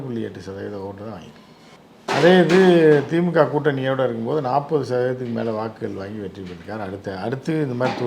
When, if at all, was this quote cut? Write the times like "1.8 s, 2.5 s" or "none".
none